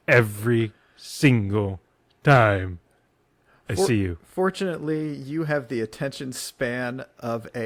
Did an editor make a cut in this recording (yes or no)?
no